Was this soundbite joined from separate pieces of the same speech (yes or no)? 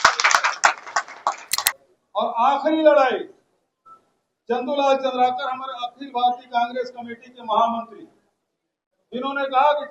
yes